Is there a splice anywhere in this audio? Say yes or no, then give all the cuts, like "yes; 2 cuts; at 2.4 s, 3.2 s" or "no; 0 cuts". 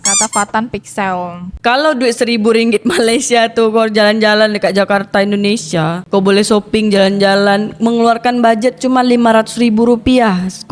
no; 0 cuts